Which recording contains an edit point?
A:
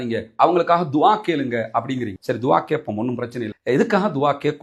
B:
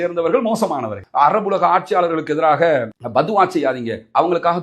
B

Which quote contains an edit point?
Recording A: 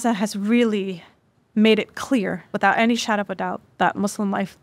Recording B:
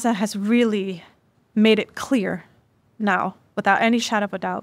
A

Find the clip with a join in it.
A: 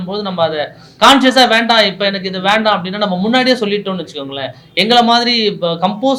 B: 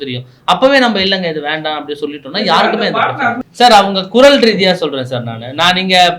B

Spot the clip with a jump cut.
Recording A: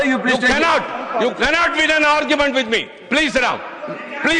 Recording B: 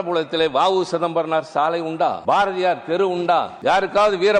B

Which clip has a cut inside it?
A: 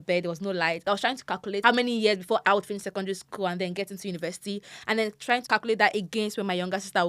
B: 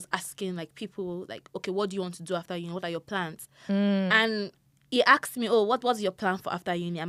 A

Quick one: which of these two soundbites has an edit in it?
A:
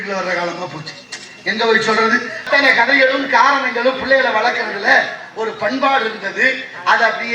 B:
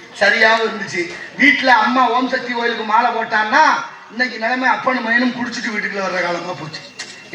A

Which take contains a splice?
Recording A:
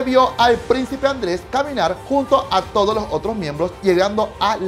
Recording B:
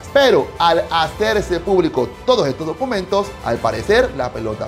A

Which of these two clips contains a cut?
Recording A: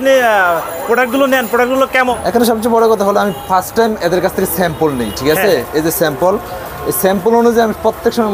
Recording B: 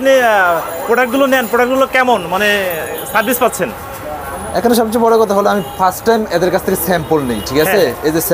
A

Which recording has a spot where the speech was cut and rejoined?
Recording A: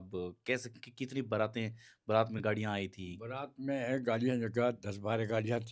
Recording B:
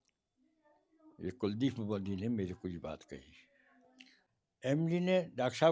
B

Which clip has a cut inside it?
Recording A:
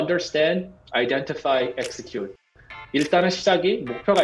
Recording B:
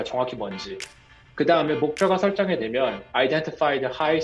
A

